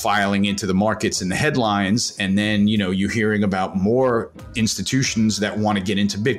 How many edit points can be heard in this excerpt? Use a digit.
0